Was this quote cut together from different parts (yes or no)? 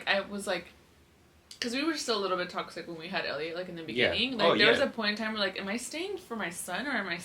no